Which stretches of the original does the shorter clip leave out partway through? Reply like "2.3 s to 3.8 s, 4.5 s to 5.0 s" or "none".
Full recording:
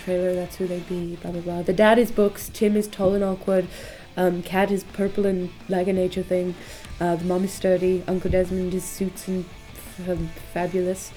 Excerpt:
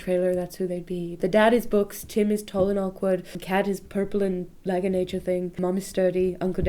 1.2 s to 1.6 s, 3.9 s to 4.4 s, 6.6 s to 7.2 s